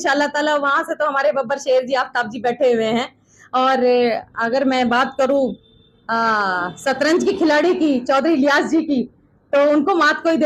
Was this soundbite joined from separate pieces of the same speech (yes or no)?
no